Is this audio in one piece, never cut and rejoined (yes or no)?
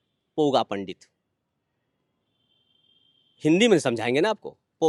yes